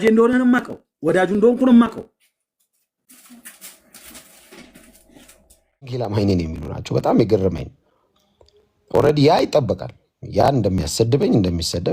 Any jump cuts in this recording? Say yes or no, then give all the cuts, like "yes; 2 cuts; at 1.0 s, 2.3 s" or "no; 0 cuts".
yes; 1 cut; at 5.9 s